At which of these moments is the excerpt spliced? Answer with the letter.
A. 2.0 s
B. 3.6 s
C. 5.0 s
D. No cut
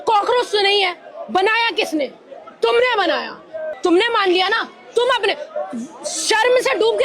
B